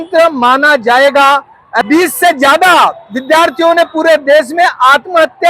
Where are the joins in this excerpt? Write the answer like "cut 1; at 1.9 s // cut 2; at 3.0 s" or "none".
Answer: cut 1; at 1.8 s